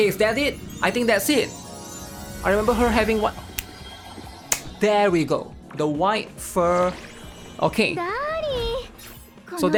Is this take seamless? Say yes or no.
yes